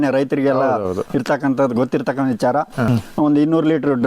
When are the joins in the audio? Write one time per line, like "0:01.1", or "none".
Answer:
0:02.9